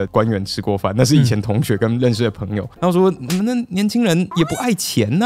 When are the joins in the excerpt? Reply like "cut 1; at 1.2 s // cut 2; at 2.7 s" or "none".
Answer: cut 1; at 2.7 s